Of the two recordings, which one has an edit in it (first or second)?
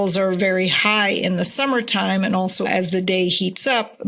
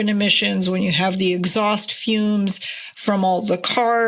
first